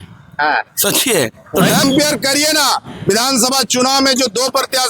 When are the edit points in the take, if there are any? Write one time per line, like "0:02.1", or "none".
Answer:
0:01.8